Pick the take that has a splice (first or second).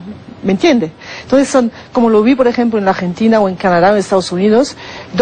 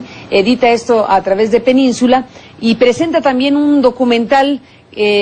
second